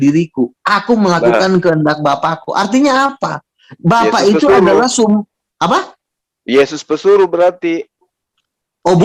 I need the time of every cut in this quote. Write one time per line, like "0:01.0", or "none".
none